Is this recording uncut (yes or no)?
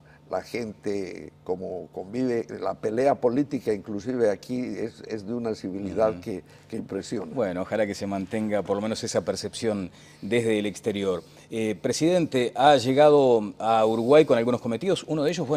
yes